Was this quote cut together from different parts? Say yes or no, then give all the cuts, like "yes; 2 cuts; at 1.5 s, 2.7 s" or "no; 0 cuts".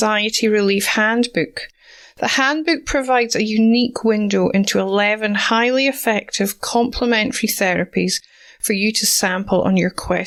no; 0 cuts